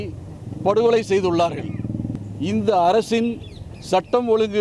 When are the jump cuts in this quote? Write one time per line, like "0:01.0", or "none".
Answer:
0:02.1